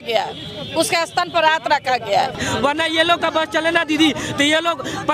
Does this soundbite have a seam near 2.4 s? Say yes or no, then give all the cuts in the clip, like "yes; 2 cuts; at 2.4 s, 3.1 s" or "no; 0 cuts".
yes; 1 cut; at 2.4 s